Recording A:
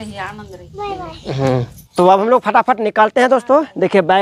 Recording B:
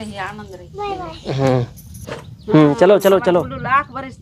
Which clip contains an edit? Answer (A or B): A